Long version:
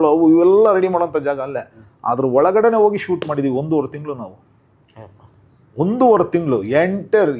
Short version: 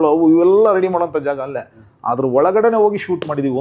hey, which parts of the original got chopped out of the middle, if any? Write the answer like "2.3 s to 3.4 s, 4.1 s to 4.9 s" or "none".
none